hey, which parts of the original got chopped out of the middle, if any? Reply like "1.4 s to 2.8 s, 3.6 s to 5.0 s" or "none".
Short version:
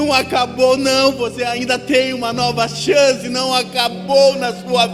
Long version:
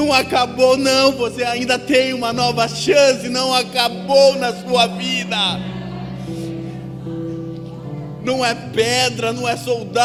none